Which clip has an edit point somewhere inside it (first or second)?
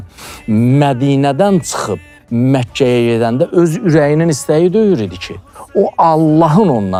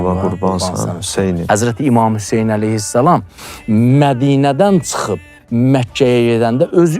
second